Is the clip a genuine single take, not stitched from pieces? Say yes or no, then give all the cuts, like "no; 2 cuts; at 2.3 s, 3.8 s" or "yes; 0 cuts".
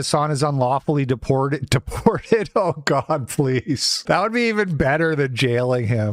yes; 0 cuts